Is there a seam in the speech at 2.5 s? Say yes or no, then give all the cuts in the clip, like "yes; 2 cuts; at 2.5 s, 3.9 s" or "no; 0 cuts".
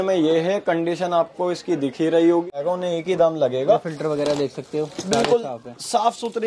yes; 1 cut; at 2.5 s